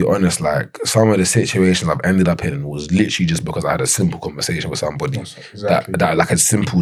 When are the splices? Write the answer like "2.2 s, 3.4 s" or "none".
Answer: none